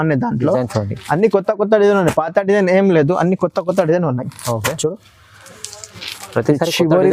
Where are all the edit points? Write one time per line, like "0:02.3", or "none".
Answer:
none